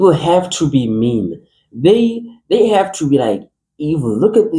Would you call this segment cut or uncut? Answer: uncut